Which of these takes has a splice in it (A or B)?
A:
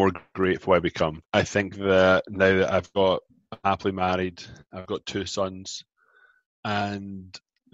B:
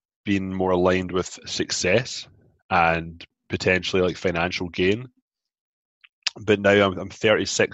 A